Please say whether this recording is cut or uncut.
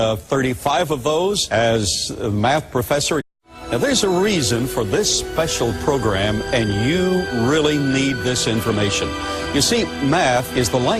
uncut